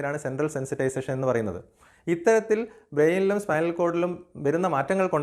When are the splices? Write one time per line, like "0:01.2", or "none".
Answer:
none